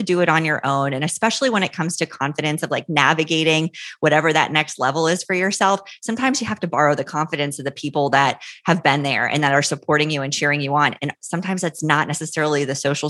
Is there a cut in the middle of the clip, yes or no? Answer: no